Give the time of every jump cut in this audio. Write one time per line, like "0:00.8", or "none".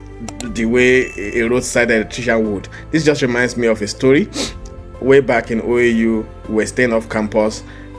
none